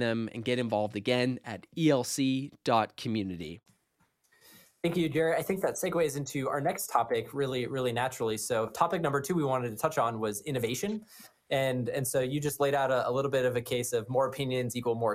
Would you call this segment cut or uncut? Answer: uncut